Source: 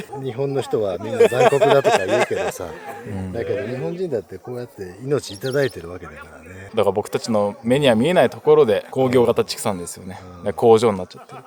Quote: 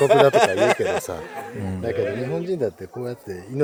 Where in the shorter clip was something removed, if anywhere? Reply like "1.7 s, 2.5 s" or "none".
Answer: none